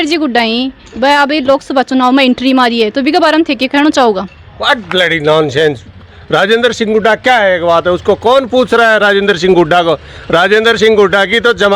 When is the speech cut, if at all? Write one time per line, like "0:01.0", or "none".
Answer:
none